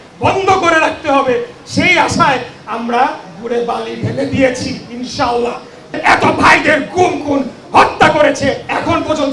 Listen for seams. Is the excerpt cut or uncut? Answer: cut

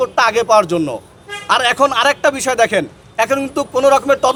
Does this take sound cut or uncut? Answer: uncut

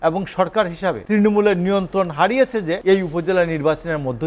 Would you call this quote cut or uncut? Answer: cut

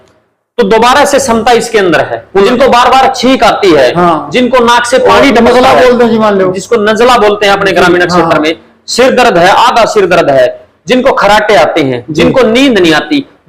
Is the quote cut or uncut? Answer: cut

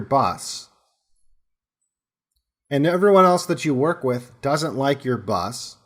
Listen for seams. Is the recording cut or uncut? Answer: uncut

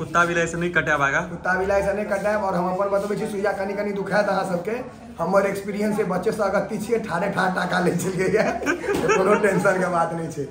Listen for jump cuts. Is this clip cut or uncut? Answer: uncut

